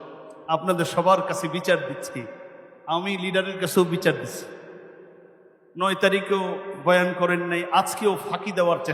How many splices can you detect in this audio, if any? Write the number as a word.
zero